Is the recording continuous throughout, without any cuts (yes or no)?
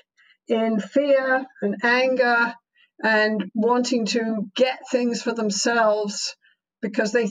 no